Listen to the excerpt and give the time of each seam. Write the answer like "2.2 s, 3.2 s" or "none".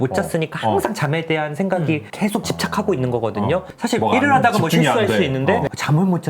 3.7 s